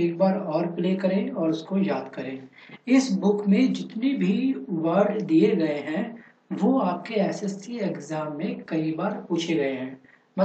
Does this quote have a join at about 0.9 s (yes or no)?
no